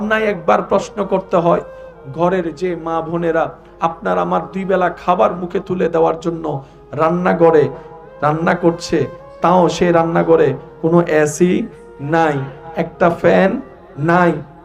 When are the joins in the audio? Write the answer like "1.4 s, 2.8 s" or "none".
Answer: none